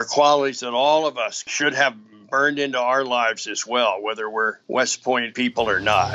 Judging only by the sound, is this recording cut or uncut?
cut